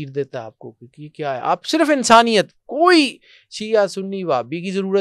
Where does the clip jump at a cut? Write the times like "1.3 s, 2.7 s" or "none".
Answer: none